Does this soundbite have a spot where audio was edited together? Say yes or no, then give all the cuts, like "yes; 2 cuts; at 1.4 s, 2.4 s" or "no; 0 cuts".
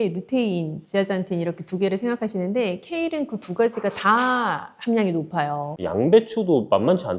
yes; 1 cut; at 5.7 s